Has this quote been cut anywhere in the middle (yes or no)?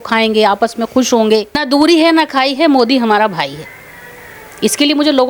yes